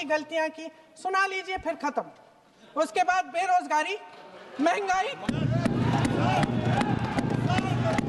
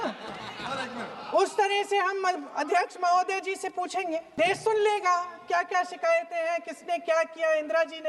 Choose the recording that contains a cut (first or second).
second